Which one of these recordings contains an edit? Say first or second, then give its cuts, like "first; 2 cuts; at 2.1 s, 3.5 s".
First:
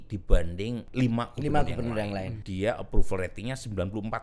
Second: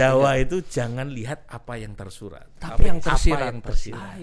first; 2 cuts; at 0.9 s, 2.4 s